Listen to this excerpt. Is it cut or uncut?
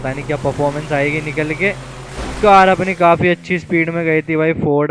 uncut